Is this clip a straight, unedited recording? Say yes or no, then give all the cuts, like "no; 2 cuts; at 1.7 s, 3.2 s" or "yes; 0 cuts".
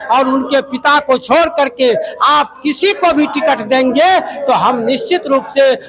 yes; 0 cuts